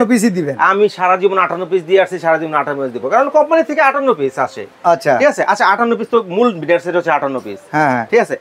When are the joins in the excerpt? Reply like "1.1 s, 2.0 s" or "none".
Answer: none